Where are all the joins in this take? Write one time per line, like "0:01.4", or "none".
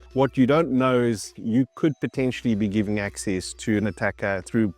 0:01.3